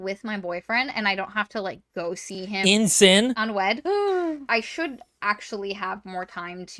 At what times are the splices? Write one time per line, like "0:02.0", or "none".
0:03.4
0:04.4